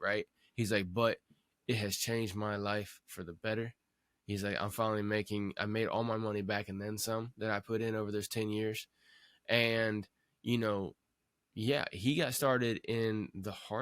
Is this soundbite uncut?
yes; 0 cuts

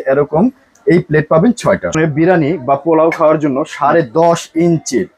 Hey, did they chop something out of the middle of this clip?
yes; 1 cut; at 1.9 s

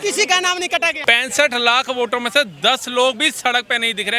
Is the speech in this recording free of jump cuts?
no; 1 cut; at 1.0 s

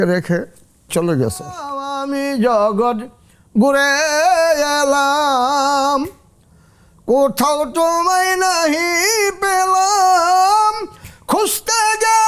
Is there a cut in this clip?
yes; 2 cuts; at 0.9 s, 1.9 s

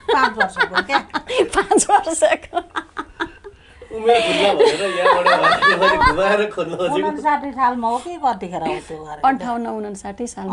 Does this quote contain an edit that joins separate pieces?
no; 0 cuts

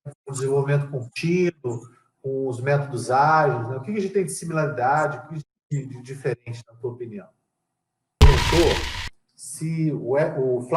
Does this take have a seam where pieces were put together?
yes; 1 cut; at 8.2 s

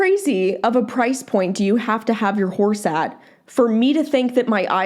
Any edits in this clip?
no; 0 cuts

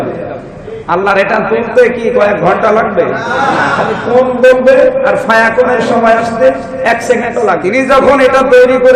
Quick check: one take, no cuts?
no; 1 cut; at 7.6 s

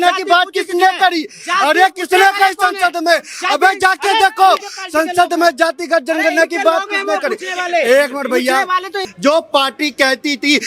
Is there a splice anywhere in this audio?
yes; 1 cut; at 8.9 s

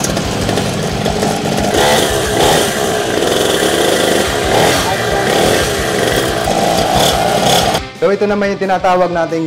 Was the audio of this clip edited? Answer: yes; 3 cuts; at 1.7 s, 6.4 s, 7.8 s

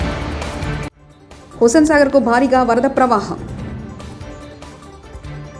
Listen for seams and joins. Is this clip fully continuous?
no; 2 cuts; at 1.1 s, 3.8 s

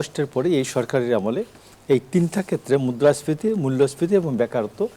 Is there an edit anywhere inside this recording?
no; 0 cuts

